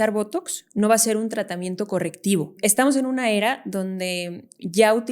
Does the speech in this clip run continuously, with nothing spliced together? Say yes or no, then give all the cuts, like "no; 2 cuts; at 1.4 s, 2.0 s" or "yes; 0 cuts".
no; 1 cut; at 2.5 s